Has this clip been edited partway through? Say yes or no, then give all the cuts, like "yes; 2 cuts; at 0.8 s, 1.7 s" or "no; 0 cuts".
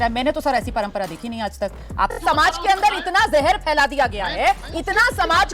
yes; 1 cut; at 2.1 s